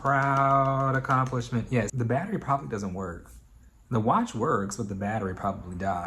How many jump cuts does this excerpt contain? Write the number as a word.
one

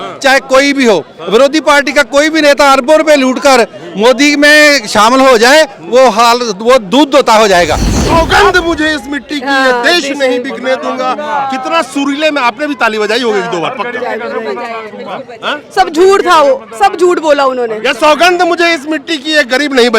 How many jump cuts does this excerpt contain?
one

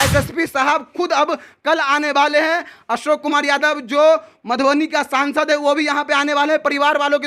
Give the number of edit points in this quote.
zero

